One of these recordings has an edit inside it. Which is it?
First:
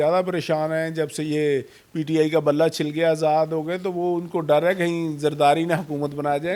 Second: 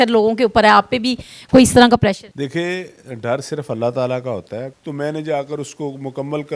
second; 2 cuts; at 2.3 s, 4.7 s

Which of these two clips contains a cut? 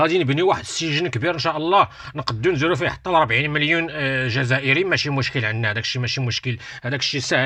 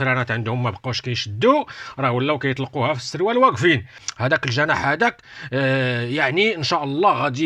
second; 1 cut; at 4.1 s

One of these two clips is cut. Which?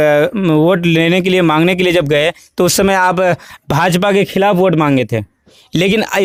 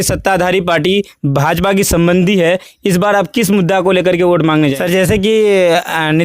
second; 1 cut; at 4.8 s

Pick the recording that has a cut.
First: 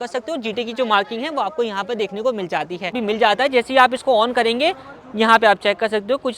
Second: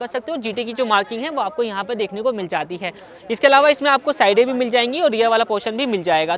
first; 1 cut; at 3.0 s

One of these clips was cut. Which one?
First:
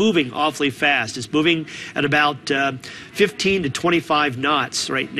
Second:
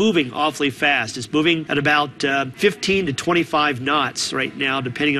second; 2 cuts; at 1.6 s, 2.5 s

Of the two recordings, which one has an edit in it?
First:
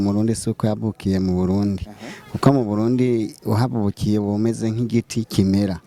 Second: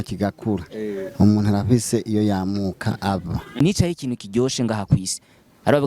second; 1 cut; at 3.5 s

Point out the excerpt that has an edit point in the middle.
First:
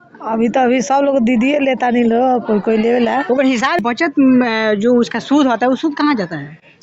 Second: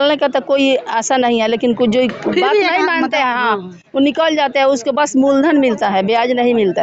first; 1 cut; at 3.8 s

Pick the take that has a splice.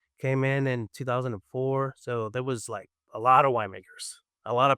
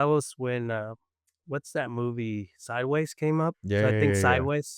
second; 1 cut; at 3.6 s

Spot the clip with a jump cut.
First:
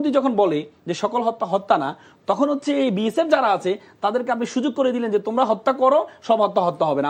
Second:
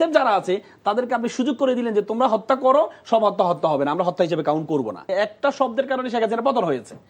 second; 1 cut; at 5.1 s

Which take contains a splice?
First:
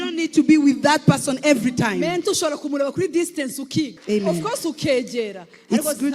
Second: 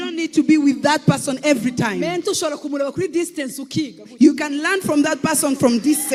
first; 1 cut; at 4.0 s

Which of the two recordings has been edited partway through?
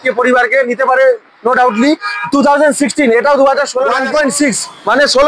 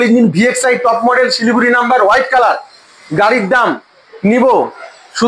first; 1 cut; at 3.9 s

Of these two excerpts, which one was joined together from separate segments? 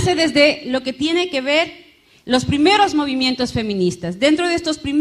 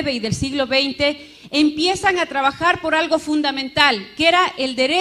second; 1 cut; at 1.7 s

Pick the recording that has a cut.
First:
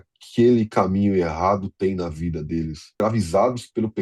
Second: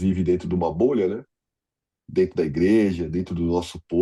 first; 1 cut; at 2.8 s

